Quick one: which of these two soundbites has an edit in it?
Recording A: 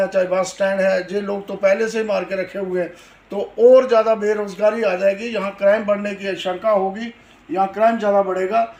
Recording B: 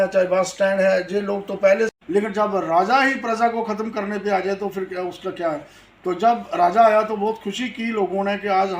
B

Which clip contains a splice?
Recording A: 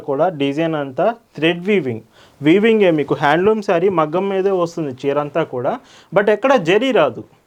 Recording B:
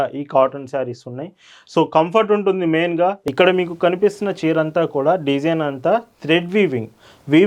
B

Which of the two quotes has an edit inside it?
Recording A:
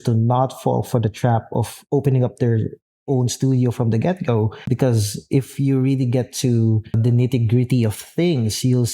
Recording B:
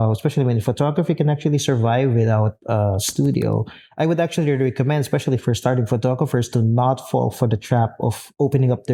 A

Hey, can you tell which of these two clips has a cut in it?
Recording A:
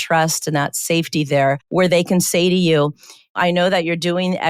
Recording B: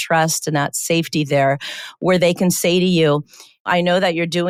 A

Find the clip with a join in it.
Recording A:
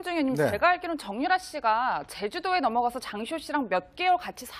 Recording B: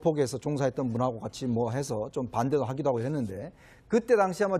A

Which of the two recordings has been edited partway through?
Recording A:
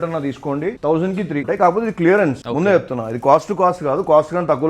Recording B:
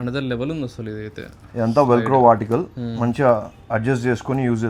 A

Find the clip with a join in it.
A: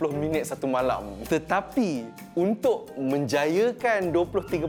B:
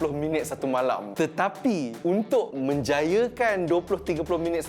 B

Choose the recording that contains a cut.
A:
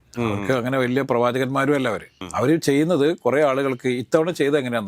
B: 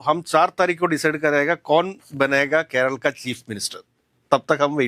A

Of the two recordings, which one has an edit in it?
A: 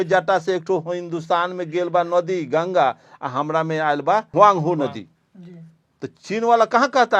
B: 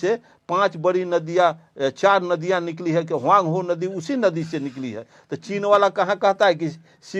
A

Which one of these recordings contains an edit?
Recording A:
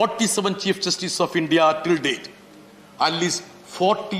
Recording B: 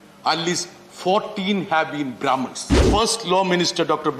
B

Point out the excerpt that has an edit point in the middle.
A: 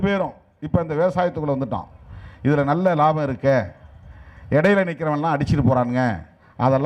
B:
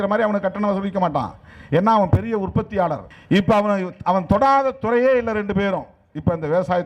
B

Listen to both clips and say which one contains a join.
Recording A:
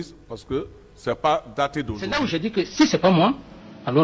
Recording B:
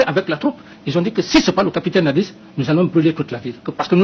A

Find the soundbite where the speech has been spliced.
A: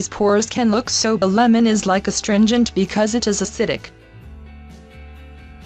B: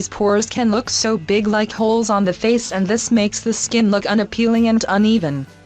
B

